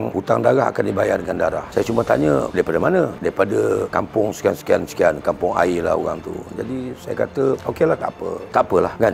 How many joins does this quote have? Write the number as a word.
zero